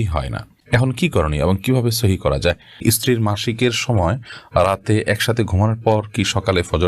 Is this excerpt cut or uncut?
cut